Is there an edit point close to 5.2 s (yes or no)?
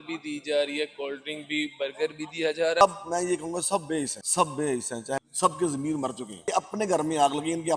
yes